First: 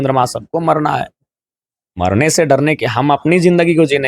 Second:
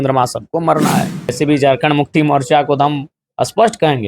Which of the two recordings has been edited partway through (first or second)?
second